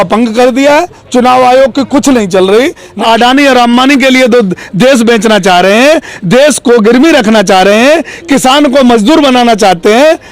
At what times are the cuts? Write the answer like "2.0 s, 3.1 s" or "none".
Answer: 2.9 s